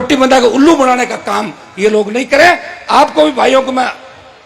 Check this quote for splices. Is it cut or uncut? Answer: uncut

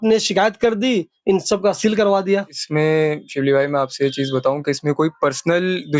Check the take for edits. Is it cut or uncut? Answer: cut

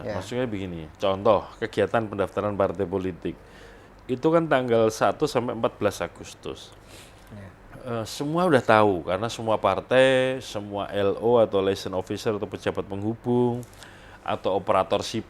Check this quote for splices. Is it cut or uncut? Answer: uncut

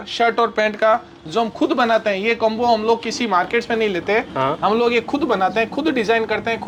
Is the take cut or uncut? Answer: uncut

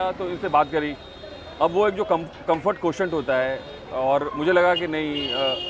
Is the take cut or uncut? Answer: uncut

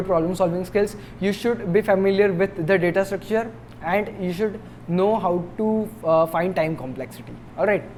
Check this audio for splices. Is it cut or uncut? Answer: uncut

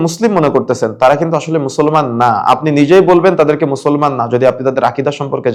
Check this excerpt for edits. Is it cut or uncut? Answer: uncut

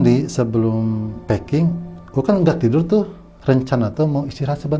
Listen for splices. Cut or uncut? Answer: cut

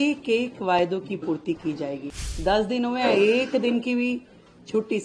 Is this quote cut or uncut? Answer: cut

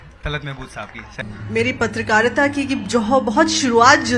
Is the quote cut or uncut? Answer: cut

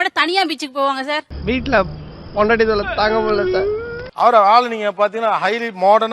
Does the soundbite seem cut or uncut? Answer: cut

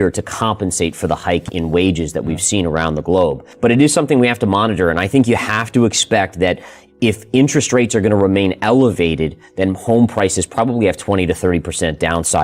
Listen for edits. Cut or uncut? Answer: cut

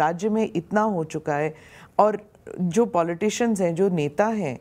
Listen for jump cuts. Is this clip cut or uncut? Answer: uncut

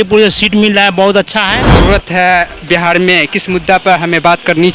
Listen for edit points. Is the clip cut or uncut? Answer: cut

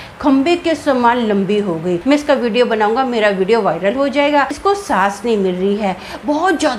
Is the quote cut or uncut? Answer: cut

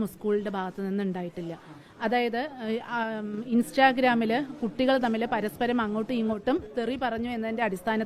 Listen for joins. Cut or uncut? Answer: uncut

